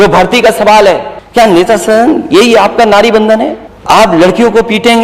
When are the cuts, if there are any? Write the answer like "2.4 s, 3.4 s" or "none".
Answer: 1.2 s, 3.7 s

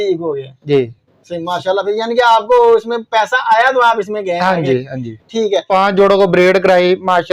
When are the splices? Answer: 5.7 s

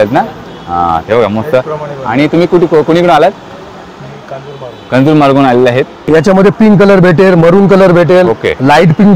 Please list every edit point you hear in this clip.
6.0 s

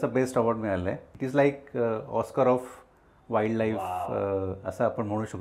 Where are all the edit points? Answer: 1.1 s

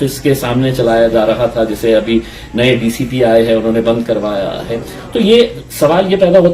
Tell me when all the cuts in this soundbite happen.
5.6 s

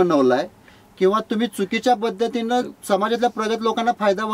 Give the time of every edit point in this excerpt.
none

